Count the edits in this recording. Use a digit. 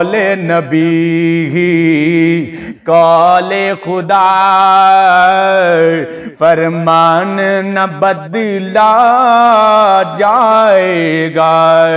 0